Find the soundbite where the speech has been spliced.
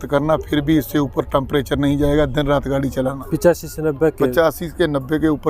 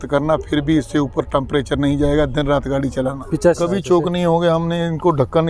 second; 1 cut; at 3.6 s

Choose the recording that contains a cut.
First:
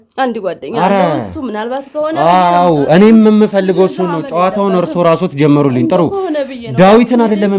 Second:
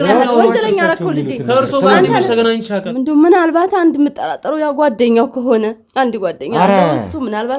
second; 1 cut; at 2.9 s

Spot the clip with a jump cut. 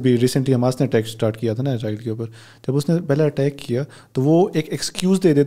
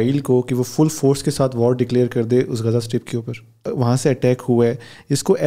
second; 1 cut; at 3.6 s

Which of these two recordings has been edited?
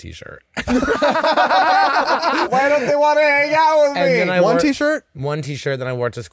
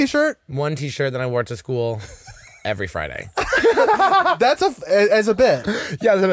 first; 1 cut; at 2.4 s

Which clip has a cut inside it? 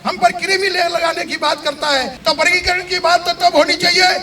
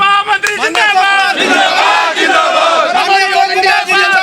first; 1 cut; at 2.1 s

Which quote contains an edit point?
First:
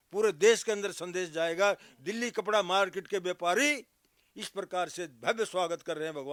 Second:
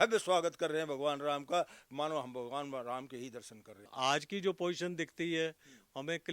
second; 1 cut; at 3.9 s

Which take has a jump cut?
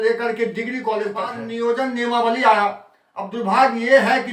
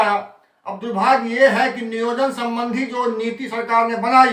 first; 1 cut; at 1.4 s

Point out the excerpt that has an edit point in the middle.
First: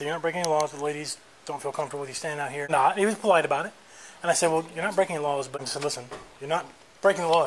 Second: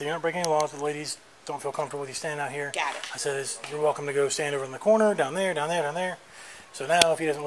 first; 2 cuts; at 2.7 s, 5.6 s

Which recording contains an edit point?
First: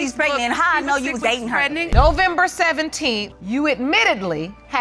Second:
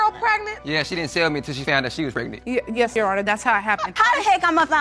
first; 1 cut; at 1.9 s

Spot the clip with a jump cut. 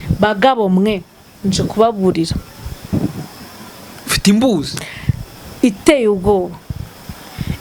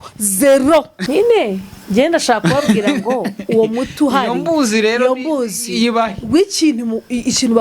second; 1 cut; at 1.0 s

